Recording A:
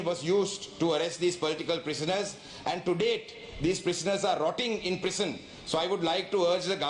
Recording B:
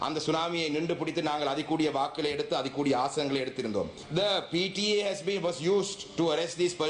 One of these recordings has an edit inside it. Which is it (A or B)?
B